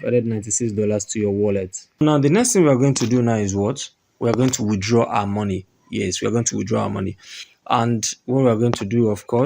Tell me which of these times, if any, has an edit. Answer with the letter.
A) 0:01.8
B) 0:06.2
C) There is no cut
A